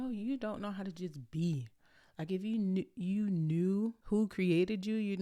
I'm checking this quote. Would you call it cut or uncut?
cut